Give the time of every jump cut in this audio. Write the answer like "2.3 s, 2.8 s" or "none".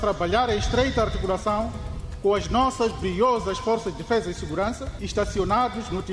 4.9 s